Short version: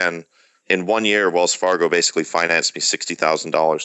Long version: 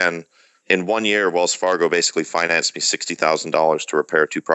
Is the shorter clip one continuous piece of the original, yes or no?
yes